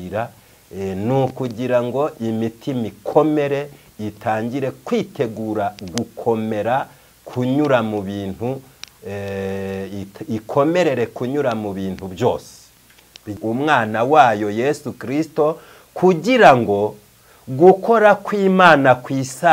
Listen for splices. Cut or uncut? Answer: cut